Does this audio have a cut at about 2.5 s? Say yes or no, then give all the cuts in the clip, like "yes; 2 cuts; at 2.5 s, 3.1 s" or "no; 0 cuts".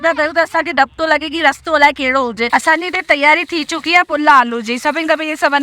yes; 1 cut; at 2.5 s